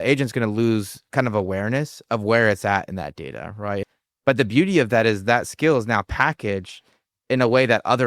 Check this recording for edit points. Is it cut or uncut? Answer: cut